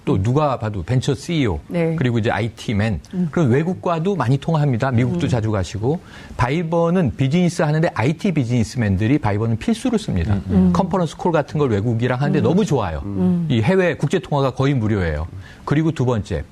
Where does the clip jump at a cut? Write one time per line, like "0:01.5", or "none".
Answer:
0:10.4